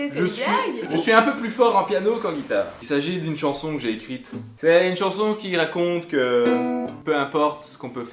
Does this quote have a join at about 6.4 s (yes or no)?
no